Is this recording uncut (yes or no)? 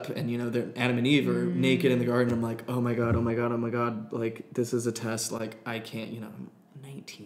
yes